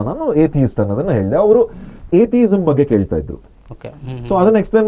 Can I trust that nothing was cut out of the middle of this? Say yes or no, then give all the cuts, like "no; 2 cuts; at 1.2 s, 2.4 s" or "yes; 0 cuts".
yes; 0 cuts